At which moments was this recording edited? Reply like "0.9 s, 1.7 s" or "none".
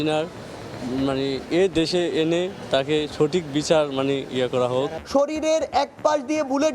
5.0 s